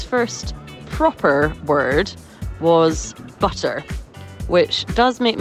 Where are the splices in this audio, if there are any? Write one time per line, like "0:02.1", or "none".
none